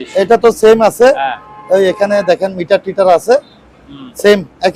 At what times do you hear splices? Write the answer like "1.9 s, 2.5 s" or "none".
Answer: none